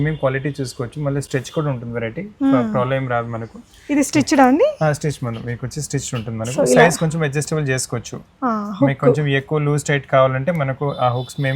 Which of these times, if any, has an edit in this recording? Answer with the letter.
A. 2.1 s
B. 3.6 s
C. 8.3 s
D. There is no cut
D